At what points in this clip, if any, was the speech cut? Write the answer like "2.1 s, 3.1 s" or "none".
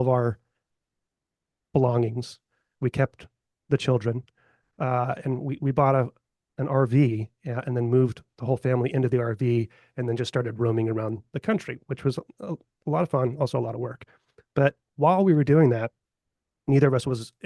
none